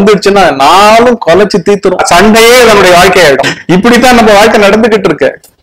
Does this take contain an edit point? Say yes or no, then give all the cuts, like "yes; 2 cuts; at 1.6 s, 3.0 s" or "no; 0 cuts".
yes; 2 cuts; at 2.0 s, 3.5 s